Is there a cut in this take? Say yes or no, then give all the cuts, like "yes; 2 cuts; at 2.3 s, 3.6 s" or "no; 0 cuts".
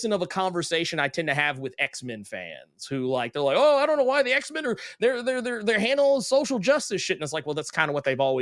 no; 0 cuts